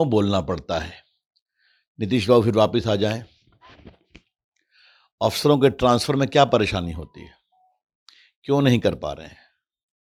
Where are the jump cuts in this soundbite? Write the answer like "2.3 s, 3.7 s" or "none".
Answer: none